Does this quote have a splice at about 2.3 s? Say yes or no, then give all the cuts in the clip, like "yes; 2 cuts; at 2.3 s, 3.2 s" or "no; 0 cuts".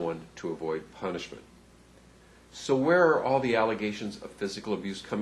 yes; 1 cut; at 2.3 s